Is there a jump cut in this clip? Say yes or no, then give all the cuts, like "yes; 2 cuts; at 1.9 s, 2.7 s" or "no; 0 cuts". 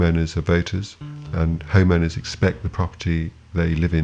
no; 0 cuts